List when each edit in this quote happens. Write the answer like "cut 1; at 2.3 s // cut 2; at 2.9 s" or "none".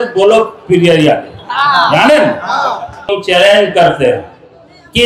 cut 1; at 3.1 s